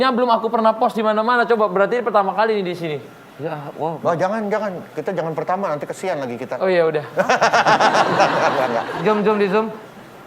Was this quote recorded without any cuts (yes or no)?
no